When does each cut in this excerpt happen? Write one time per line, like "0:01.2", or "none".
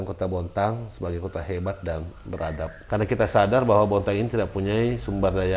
0:02.8